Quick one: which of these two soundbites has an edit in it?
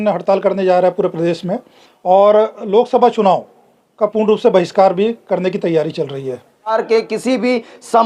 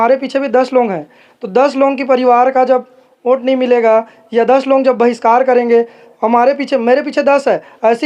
first; 1 cut; at 6.8 s

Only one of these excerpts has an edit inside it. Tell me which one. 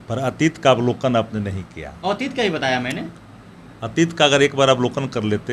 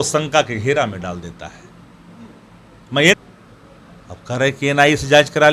second; 1 cut; at 3.1 s

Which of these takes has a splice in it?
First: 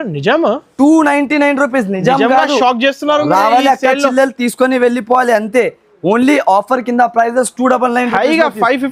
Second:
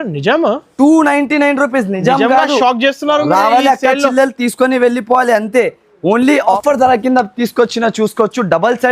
second; 1 cut; at 6.6 s

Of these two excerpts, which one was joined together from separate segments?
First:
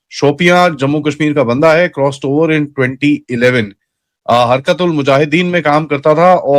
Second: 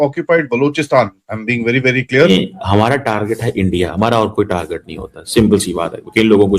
second; 1 cut; at 2.3 s

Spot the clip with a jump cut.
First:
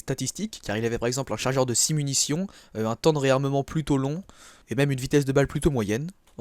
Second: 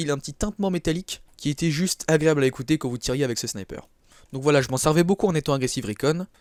first; 1 cut; at 3.3 s

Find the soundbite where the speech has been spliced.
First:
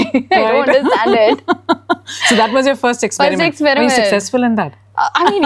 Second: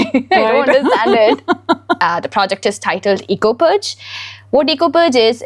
second; 1 cut; at 2.0 s

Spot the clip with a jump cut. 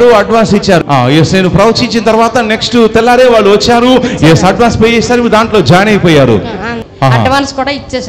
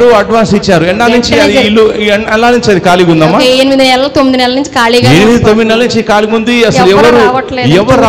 first; 2 cuts; at 0.8 s, 6.8 s

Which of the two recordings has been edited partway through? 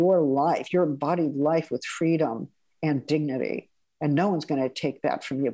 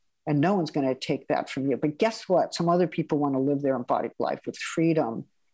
second; 1 cut; at 4.6 s

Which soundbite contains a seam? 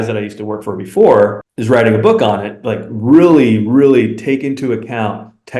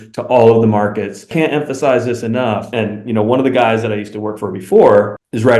second; 2 cuts; at 1.3 s, 2.7 s

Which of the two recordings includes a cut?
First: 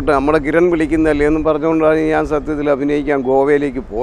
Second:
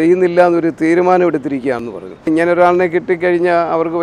second; 1 cut; at 2.3 s

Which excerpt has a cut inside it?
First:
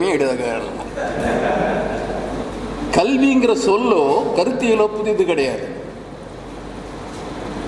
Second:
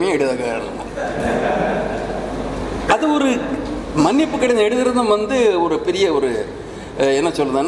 first; 1 cut; at 2.5 s

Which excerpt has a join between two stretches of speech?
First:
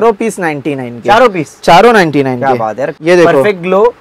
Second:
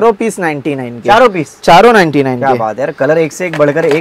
first; 1 cut; at 2.9 s

